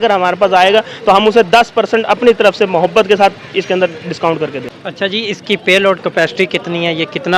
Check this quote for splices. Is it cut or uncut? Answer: cut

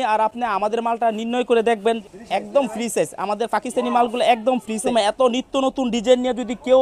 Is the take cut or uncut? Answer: cut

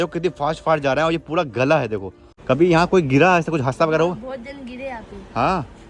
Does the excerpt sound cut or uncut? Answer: cut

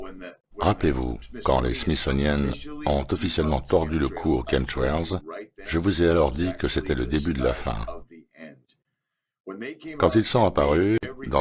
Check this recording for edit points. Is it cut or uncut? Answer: cut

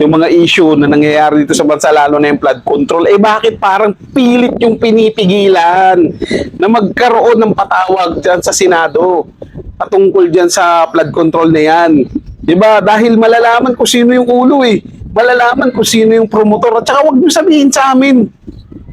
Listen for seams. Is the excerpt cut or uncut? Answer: uncut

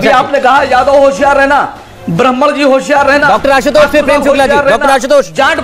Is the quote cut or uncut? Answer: uncut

